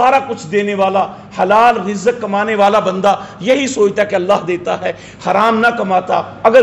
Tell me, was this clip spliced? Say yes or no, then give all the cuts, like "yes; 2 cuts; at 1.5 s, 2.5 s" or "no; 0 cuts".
no; 0 cuts